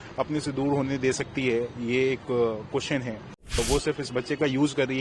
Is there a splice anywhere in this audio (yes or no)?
yes